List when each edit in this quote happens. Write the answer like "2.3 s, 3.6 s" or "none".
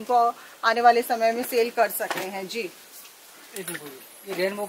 none